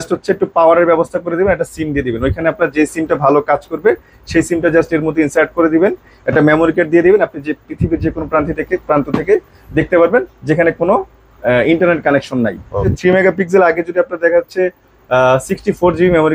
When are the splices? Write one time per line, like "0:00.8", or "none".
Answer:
0:12.9